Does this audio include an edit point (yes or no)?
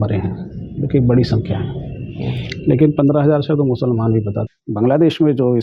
yes